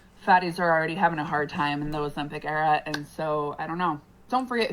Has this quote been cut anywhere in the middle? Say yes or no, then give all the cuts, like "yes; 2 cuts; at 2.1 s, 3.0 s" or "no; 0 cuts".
yes; 1 cut; at 2.2 s